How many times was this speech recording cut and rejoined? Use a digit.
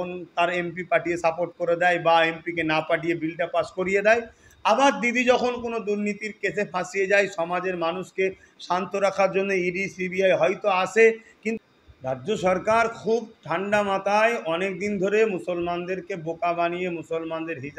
1